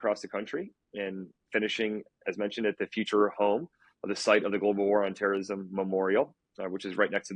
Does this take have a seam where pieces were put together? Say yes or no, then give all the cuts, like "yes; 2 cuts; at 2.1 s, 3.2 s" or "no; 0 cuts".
no; 0 cuts